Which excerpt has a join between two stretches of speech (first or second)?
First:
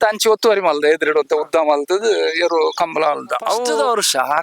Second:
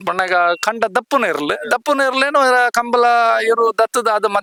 first